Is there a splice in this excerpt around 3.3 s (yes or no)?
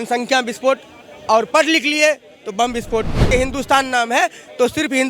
yes